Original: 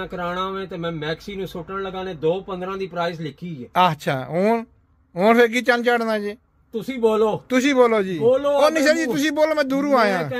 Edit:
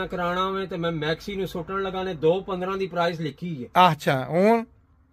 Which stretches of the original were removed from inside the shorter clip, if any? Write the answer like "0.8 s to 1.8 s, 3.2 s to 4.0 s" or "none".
none